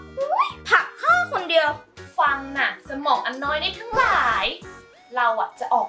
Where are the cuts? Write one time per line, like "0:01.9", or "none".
0:01.9